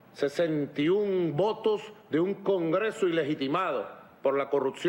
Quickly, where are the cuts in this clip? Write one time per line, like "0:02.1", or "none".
0:03.5